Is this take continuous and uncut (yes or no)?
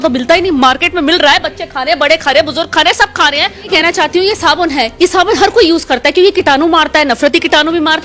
no